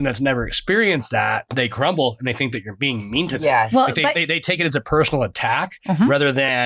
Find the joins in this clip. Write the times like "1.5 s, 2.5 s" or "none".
none